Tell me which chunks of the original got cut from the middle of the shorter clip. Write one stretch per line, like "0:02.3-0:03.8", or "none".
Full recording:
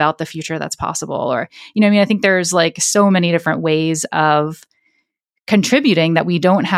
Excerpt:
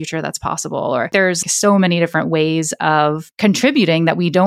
0:01.7-0:02.7
0:04.6-0:05.3